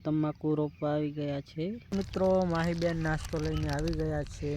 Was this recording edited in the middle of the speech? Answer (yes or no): yes